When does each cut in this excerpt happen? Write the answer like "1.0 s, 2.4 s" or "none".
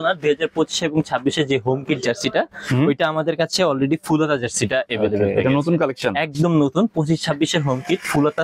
none